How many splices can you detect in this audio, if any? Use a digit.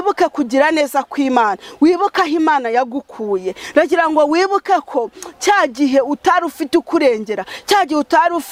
0